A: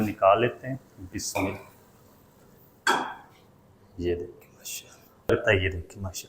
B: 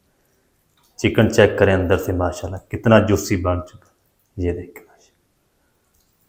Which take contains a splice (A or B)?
A